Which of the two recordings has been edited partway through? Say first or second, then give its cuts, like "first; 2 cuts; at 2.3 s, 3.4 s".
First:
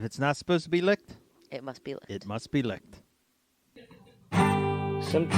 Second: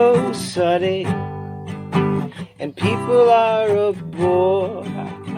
first; 1 cut; at 3.7 s